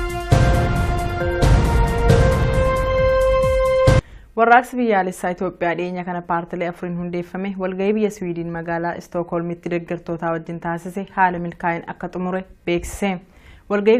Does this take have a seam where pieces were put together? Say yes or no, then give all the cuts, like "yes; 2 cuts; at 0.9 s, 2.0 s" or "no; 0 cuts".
no; 0 cuts